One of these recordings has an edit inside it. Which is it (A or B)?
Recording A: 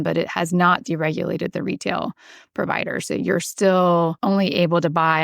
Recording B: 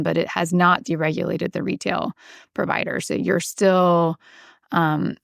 A